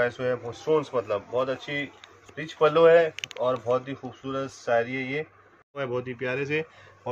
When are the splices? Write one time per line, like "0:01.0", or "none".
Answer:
0:05.8